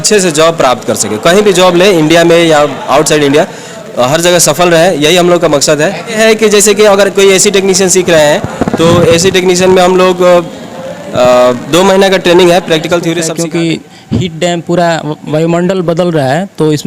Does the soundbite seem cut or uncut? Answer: cut